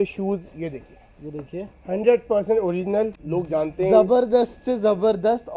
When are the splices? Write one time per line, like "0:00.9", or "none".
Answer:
0:03.2